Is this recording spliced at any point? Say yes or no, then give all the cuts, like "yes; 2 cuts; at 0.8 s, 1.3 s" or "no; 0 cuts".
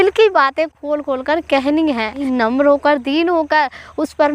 yes; 1 cut; at 2.2 s